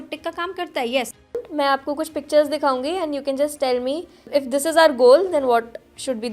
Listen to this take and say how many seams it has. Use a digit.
2